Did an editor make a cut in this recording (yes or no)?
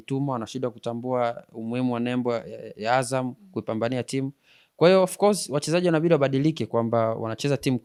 no